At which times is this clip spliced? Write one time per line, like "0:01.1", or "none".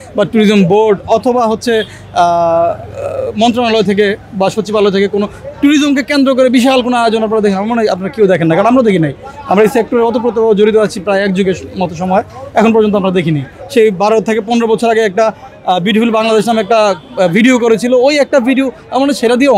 none